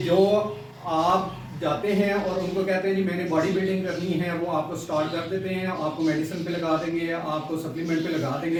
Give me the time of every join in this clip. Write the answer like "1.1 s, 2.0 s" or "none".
none